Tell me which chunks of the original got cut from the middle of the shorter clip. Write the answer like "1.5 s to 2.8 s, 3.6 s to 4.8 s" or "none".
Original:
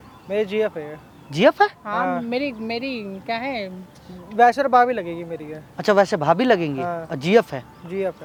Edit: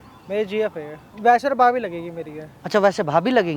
1.0 s to 4.1 s